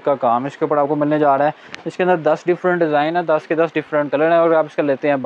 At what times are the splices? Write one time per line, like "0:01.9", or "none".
none